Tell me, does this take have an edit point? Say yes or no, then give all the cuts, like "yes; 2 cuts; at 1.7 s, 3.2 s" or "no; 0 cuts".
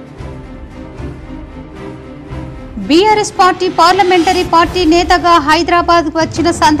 no; 0 cuts